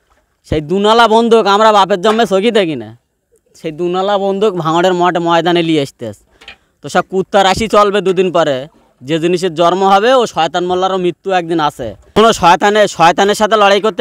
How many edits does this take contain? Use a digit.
1